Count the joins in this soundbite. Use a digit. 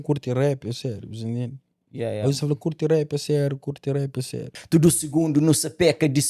1